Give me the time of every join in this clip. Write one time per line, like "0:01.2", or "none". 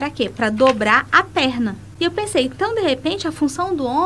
0:01.8